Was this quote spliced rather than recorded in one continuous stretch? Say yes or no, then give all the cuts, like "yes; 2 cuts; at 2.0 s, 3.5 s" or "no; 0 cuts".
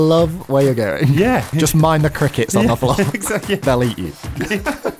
yes; 2 cuts; at 1.5 s, 3.6 s